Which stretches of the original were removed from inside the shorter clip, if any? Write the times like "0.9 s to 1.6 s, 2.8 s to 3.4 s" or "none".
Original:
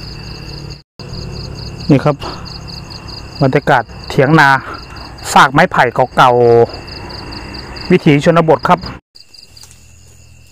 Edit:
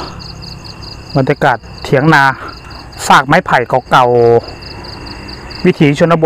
none